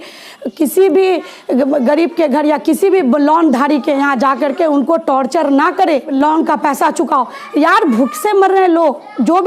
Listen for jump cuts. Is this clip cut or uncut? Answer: cut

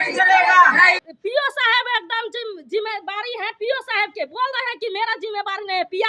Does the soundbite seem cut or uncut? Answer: cut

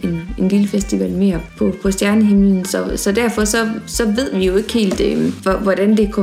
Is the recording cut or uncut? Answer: cut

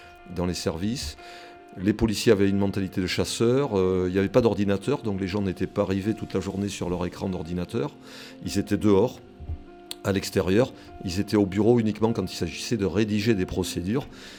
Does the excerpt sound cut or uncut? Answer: uncut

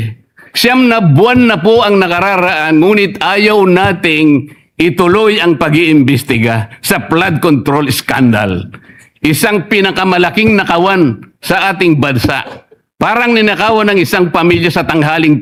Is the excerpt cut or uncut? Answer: uncut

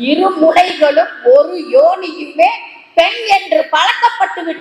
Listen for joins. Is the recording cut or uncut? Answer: uncut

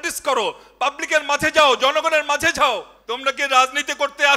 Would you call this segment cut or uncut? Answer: cut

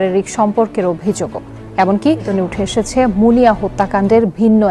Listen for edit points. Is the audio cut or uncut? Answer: cut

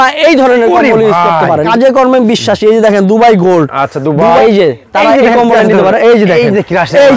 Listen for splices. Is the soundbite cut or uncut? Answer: cut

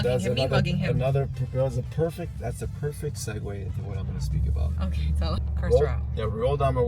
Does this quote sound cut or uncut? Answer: cut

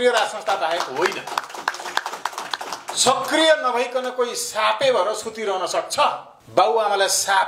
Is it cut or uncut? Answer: uncut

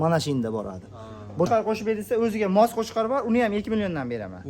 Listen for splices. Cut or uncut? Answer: cut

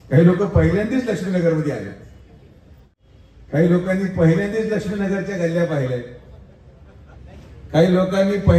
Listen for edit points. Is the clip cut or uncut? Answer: cut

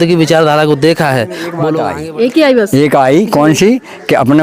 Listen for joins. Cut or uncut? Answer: cut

